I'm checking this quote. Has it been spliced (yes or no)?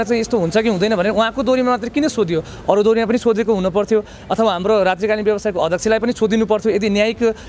no